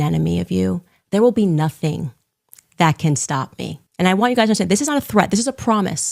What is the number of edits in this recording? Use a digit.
2